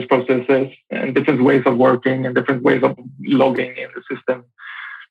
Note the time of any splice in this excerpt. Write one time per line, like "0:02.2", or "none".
0:00.9
0:03.0

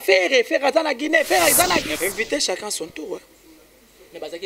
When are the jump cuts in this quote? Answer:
0:01.9

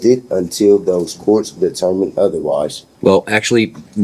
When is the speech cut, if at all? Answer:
0:02.8

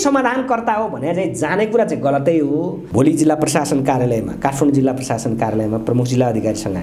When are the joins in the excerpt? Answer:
0:02.8

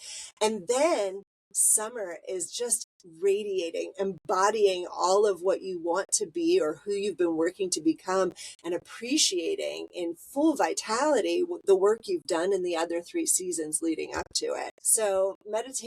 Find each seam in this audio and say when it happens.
0:14.8

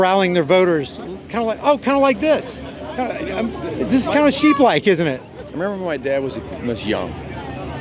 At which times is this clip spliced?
none

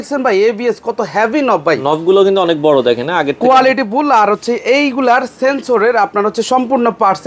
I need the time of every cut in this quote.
none

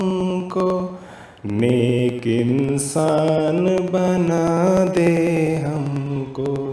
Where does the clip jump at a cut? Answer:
0:05.3

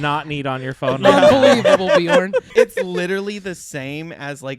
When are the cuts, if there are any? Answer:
0:02.5

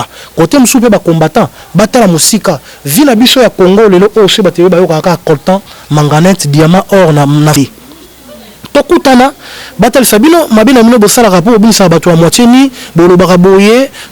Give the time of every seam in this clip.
0:07.5

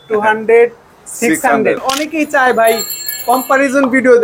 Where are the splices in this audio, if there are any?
0:01.9

